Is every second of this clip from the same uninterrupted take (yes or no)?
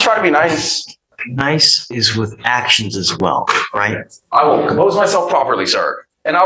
no